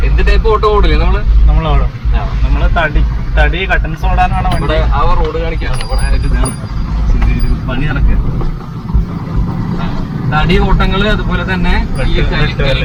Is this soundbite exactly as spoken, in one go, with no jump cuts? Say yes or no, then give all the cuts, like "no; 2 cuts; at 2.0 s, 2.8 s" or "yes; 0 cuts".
yes; 0 cuts